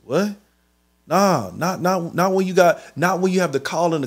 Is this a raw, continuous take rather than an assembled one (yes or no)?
yes